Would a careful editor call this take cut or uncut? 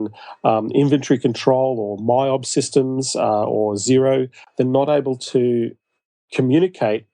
cut